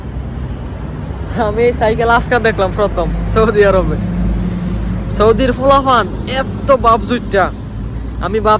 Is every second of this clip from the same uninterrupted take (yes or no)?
yes